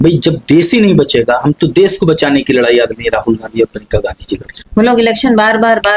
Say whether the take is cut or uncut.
cut